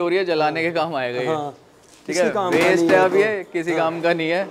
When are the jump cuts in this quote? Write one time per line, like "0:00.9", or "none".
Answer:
none